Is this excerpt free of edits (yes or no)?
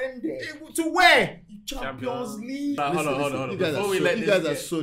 no